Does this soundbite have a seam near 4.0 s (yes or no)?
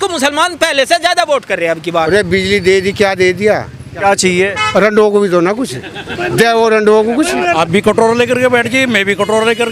yes